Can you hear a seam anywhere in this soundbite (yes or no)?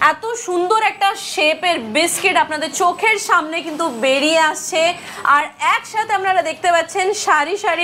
no